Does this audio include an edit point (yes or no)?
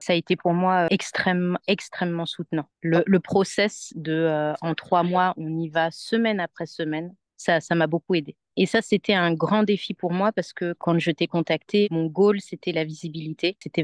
yes